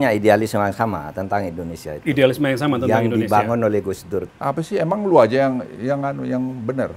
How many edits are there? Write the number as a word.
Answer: one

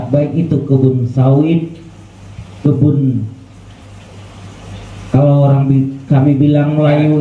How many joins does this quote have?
zero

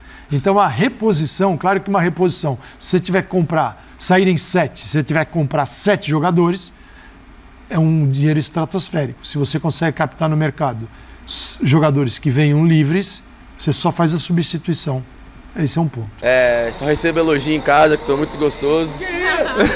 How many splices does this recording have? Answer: one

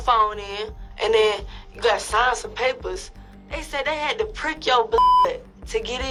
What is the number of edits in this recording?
zero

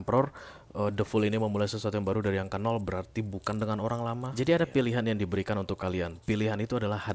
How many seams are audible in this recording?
one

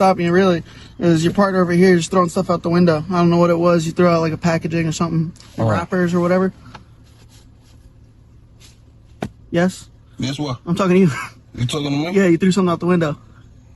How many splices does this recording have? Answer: one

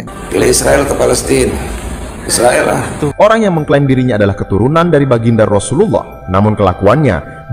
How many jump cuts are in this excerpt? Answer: one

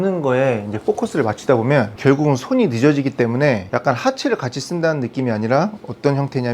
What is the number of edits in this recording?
two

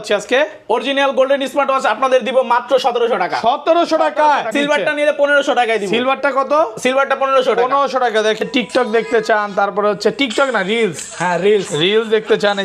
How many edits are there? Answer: two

